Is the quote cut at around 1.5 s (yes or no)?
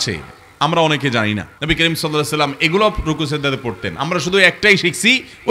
yes